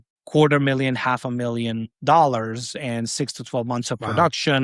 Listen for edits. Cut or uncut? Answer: uncut